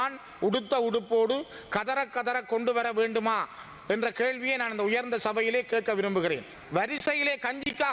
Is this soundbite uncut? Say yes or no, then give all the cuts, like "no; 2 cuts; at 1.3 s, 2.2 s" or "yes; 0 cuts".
no; 1 cut; at 6.5 s